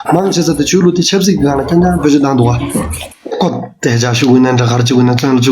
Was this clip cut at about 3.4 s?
yes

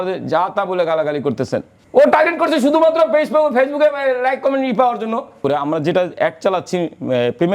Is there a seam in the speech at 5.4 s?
yes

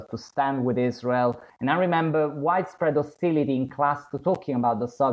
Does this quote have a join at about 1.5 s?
yes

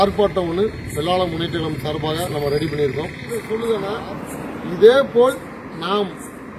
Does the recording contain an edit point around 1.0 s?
no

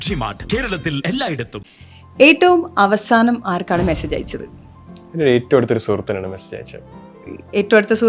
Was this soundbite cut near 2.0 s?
yes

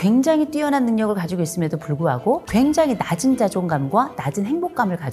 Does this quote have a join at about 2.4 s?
yes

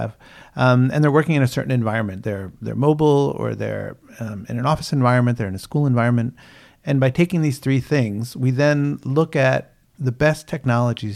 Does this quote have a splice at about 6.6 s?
no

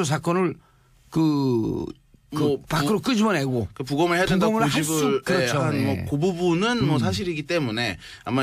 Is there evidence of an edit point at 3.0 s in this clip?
no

